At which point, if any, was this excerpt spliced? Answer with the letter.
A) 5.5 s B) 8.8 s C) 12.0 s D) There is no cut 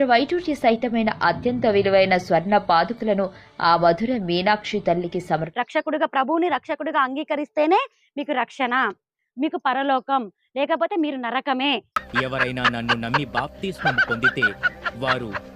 A